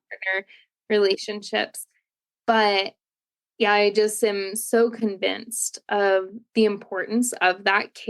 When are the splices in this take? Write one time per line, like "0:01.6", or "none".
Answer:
0:06.4